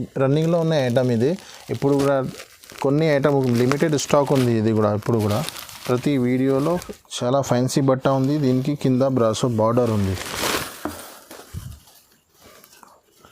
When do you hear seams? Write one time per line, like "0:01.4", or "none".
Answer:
0:06.9